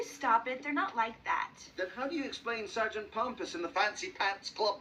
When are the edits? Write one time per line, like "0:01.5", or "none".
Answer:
none